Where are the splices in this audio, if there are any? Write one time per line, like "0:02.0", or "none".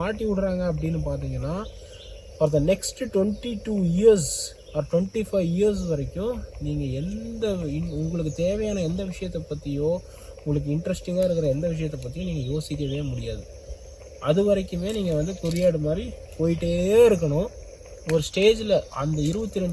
none